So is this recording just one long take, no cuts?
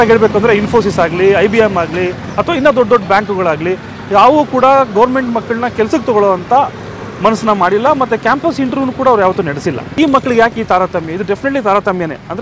no; 1 cut; at 9.9 s

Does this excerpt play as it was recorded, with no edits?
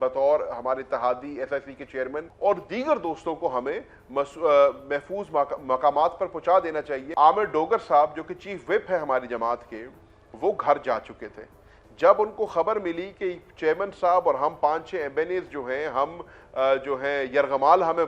no; 2 cuts; at 2.2 s, 7.0 s

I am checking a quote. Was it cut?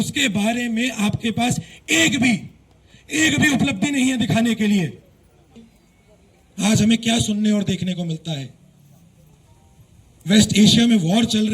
yes; 1 cut; at 5.6 s

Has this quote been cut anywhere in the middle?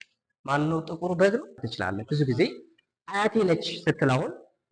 yes; 1 cut; at 2.0 s

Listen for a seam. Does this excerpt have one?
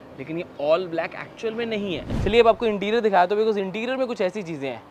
yes; 1 cut; at 2.1 s

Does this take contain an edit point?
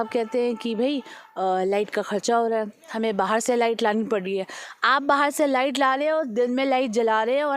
no; 0 cuts

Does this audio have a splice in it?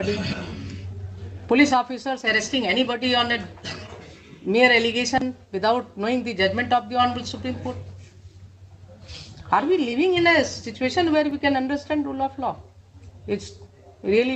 no; 0 cuts

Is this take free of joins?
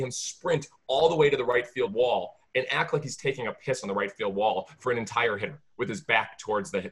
yes; 0 cuts

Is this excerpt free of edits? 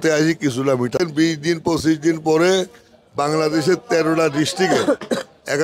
no; 1 cut; at 0.9 s

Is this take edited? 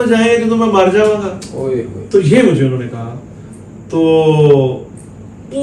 no; 0 cuts

